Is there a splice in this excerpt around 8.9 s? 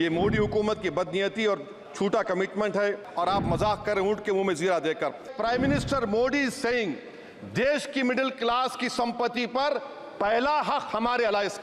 no; 2 cuts; at 3.1 s, 5.3 s

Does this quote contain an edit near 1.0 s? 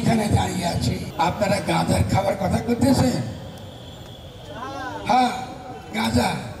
yes; 1 cut; at 1.0 s

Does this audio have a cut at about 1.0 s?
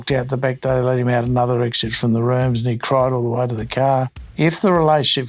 no; 1 cut; at 4.2 s

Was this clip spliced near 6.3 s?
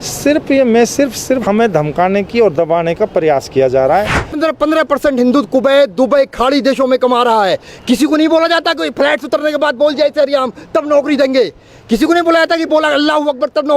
no; 2 cuts; at 1.4 s, 4.4 s

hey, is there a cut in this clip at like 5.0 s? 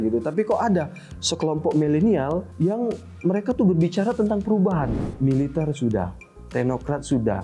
yes; 2 cuts; at 2.5 s, 5.0 s

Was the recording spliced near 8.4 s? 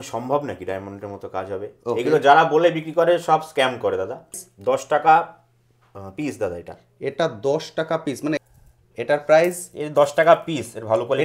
yes; 2 cuts; at 4.4 s, 8.4 s

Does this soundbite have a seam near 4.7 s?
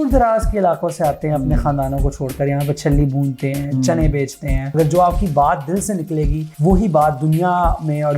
yes; 2 cuts; at 4.7 s, 6.4 s

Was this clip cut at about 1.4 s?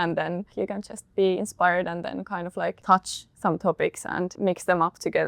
no; 2 cuts; at 2.8 s, 4.3 s

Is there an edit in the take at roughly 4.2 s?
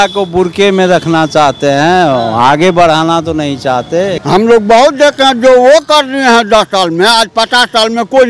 yes; 1 cut; at 4.2 s

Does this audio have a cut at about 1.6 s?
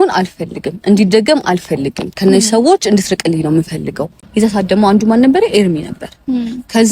no; 1 cut; at 4.2 s

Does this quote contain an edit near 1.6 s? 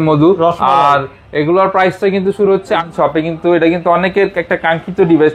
no; 1 cut; at 2.8 s

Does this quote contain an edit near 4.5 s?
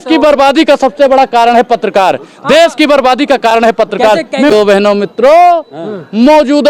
yes; 1 cut; at 4.5 s

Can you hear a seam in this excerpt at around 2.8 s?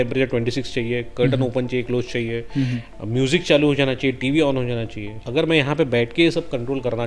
no; 1 cut; at 5.1 s

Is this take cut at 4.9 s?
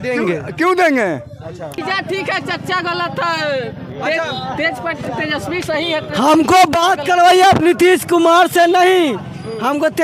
no; 1 cut; at 1.8 s

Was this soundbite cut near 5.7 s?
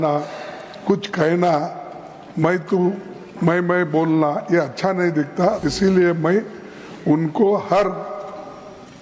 yes; 1 cut; at 5.7 s

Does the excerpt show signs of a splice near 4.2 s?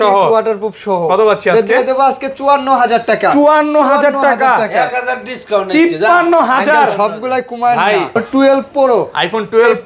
no; 1 cut; at 8.2 s

